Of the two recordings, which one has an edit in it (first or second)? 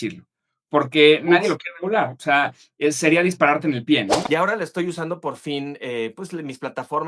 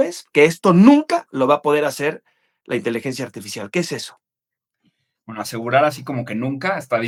first